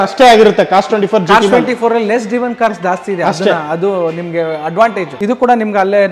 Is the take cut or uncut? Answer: cut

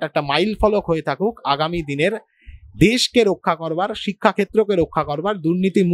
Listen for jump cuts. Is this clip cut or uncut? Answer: uncut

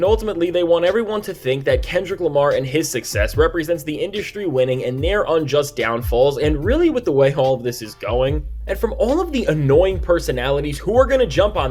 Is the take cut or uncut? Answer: uncut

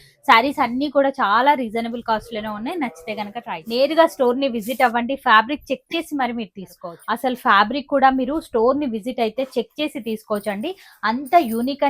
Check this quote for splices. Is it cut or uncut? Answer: cut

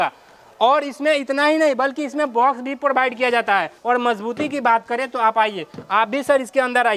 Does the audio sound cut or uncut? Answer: cut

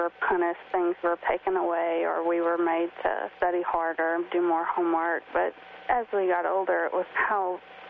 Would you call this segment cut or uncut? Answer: uncut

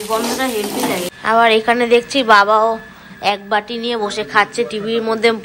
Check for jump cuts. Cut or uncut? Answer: cut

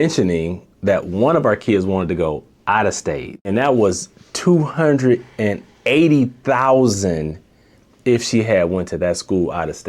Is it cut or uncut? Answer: cut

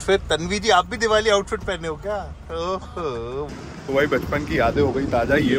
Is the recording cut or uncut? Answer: cut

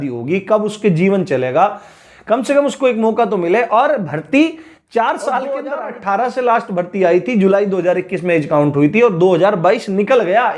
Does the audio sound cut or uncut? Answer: cut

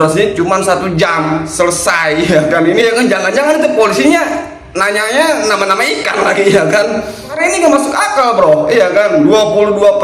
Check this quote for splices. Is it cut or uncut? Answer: cut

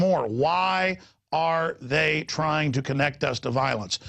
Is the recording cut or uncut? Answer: cut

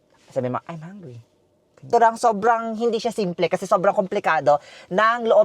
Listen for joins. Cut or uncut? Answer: cut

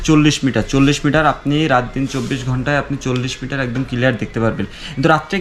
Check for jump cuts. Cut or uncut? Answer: uncut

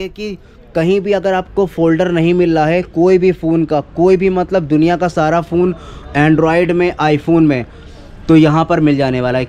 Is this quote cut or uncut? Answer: uncut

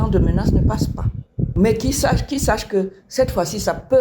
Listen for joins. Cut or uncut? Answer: cut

